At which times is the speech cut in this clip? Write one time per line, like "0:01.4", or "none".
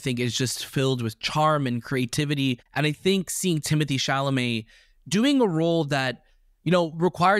0:02.7